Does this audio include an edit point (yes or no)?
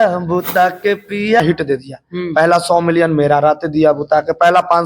yes